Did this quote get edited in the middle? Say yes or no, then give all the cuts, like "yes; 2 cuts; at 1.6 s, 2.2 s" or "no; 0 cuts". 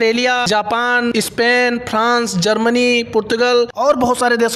no; 0 cuts